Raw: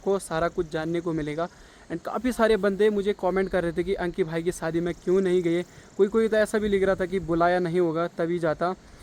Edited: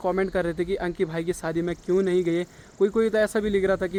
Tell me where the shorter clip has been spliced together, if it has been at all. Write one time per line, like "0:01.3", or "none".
none